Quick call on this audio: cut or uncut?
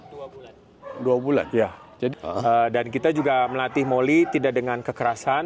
cut